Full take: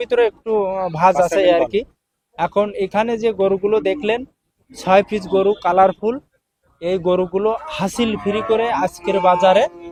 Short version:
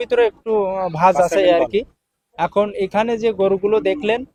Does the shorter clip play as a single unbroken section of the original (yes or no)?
yes